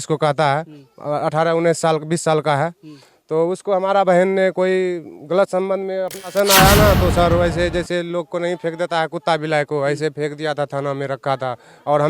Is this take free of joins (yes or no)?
no